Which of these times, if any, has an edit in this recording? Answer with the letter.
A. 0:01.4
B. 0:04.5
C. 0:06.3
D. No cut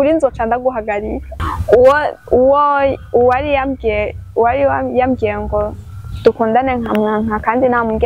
A